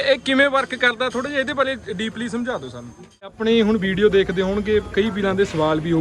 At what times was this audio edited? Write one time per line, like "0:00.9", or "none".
0:03.4